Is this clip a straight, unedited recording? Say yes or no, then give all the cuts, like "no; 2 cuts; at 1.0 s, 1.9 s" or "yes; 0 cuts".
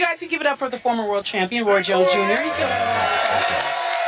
no; 1 cut; at 2.7 s